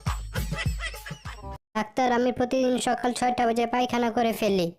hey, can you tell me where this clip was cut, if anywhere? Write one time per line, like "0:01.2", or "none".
0:01.8

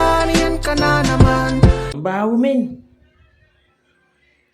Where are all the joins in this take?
0:01.9

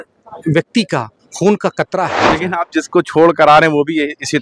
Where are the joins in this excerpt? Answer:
0:02.4

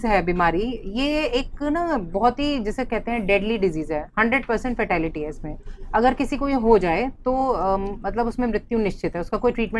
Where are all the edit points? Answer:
none

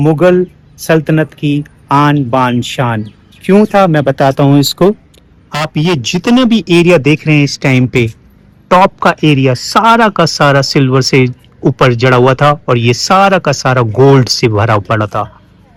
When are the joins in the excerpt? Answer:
none

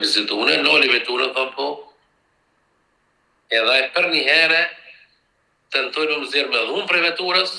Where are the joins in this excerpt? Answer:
none

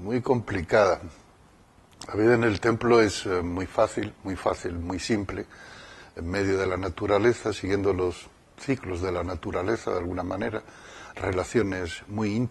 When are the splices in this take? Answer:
none

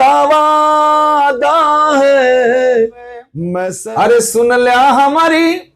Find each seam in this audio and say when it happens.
0:03.4

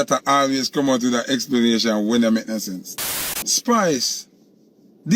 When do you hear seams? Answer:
0:02.9

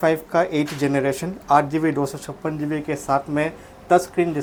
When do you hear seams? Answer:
none

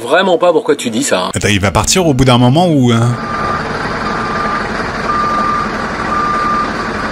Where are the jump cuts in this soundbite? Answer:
none

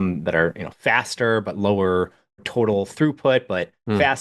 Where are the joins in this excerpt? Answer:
0:02.5

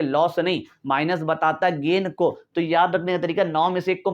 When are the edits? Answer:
none

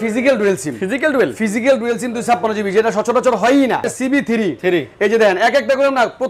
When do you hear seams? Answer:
0:03.9

